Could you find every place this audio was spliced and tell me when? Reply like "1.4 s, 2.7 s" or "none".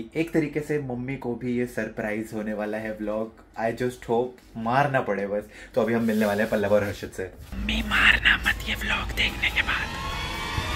7.6 s